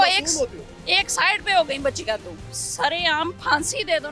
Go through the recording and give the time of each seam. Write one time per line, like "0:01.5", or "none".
0:02.5

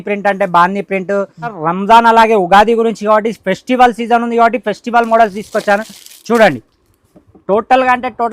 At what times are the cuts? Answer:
0:01.4

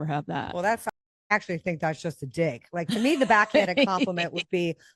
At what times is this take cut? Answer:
none

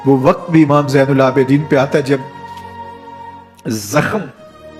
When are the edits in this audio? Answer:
none

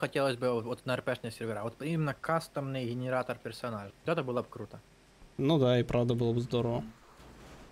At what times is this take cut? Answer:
0:03.9

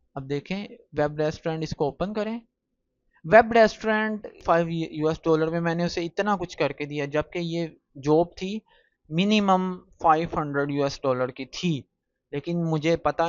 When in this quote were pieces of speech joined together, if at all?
0:04.4

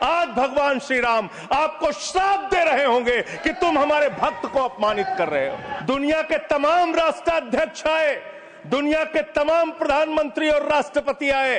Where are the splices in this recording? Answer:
0:05.7

